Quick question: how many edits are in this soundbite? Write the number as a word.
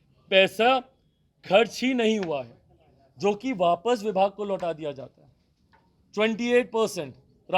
zero